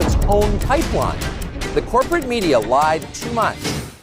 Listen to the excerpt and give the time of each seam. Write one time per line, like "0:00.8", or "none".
0:02.5